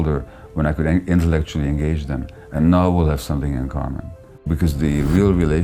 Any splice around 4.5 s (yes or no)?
yes